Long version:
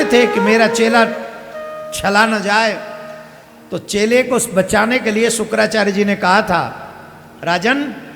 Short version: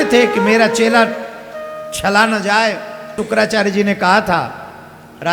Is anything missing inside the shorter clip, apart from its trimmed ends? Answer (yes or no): yes